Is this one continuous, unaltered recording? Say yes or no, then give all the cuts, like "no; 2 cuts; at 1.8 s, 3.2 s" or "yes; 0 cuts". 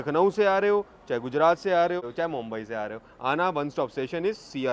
no; 1 cut; at 2.0 s